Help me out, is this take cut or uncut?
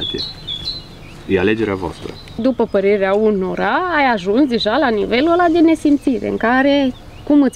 cut